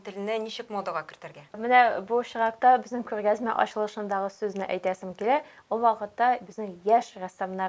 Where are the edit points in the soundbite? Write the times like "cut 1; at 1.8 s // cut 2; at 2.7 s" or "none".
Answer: cut 1; at 1.6 s